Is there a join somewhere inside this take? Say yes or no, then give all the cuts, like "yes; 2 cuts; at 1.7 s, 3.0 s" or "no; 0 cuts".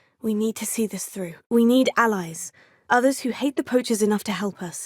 no; 0 cuts